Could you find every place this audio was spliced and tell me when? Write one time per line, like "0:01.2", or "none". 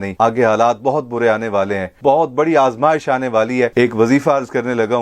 0:01.9
0:03.7